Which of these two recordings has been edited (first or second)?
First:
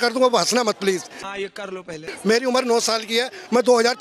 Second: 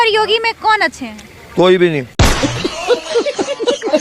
second